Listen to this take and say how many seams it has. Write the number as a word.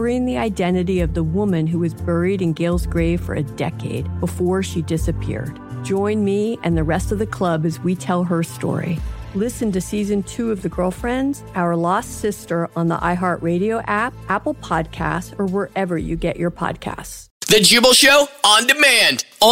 one